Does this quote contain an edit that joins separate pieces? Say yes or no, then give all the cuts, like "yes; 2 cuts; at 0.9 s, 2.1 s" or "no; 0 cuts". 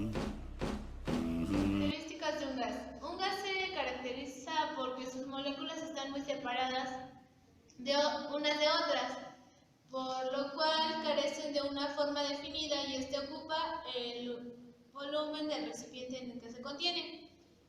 no; 0 cuts